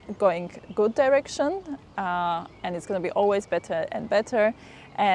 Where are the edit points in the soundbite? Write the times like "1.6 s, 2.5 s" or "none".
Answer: none